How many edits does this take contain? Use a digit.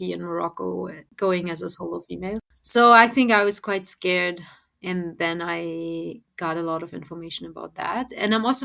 2